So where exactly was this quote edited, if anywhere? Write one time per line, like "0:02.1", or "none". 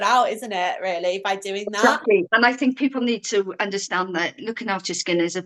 0:02.3